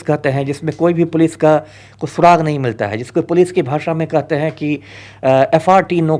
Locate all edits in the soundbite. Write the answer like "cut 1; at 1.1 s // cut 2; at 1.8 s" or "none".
none